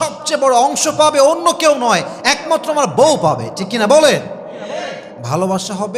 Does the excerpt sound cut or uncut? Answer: uncut